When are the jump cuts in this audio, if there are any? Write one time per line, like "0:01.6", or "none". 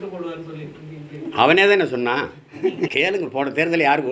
0:02.9